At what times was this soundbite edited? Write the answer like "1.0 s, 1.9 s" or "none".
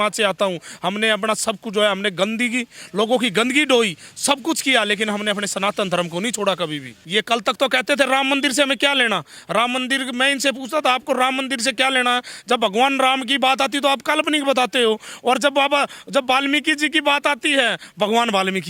7.0 s